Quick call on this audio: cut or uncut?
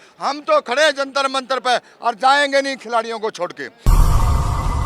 cut